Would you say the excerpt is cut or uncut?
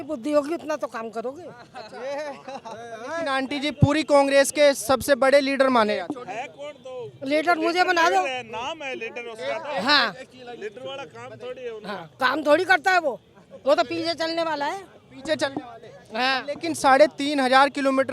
uncut